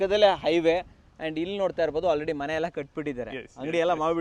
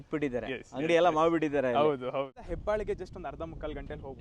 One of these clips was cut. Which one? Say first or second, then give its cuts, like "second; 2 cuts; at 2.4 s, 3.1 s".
second; 1 cut; at 2.3 s